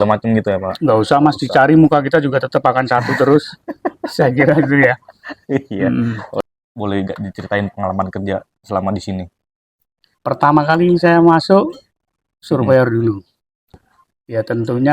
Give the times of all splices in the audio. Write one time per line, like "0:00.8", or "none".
0:06.4
0:13.8